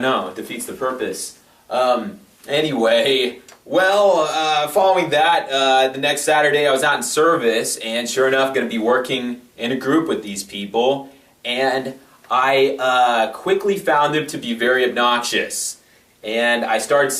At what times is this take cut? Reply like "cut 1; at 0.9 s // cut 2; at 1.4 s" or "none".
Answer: cut 1; at 9.9 s